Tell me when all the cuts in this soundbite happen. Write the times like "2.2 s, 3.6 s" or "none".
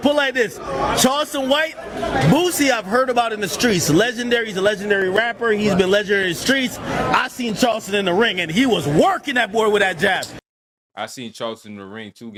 none